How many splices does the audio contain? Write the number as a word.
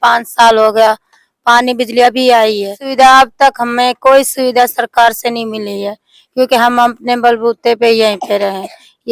one